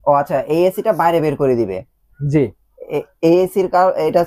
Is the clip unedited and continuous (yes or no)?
yes